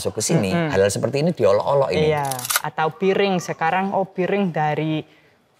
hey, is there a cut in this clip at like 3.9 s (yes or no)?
no